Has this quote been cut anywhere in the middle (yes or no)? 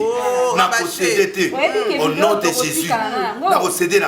no